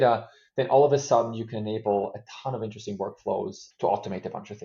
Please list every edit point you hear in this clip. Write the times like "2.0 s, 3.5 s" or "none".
3.6 s